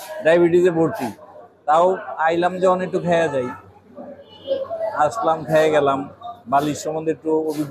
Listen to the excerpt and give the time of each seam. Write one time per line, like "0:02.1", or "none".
none